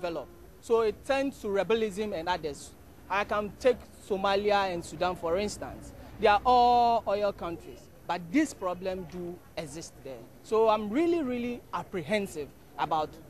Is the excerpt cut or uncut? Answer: cut